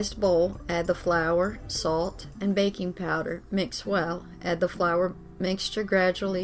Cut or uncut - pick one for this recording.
uncut